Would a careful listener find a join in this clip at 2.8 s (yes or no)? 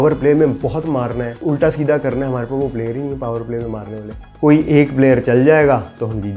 no